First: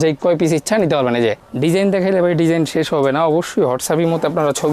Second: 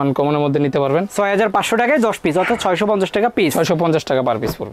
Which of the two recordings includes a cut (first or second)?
first